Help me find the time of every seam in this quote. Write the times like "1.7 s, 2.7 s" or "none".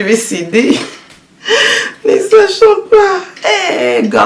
3.3 s